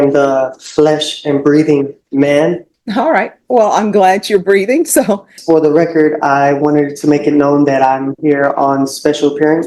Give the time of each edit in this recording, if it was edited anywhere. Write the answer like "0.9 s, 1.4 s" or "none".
2.7 s, 5.3 s